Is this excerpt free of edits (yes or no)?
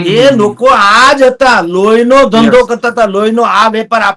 yes